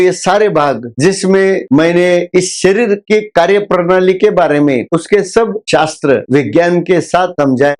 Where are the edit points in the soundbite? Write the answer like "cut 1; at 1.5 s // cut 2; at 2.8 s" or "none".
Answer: none